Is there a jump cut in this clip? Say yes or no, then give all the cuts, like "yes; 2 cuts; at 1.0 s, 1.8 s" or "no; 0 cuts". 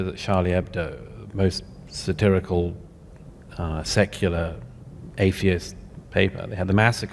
no; 0 cuts